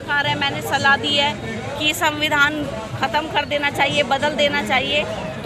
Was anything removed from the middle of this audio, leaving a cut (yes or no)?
no